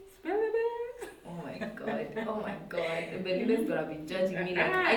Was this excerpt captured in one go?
yes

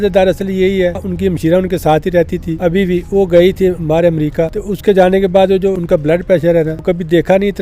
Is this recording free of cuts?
no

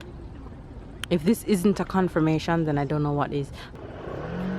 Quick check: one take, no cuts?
no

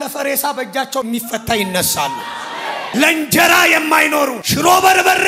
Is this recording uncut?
no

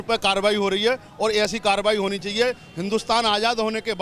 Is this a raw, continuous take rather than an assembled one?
yes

